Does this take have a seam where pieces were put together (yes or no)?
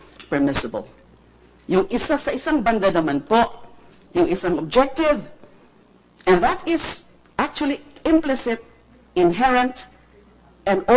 yes